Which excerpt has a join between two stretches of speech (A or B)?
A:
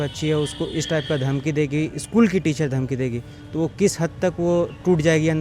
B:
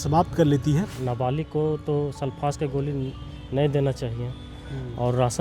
B